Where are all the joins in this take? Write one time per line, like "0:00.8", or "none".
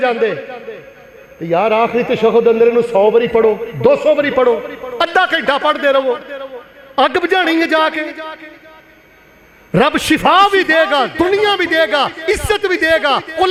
none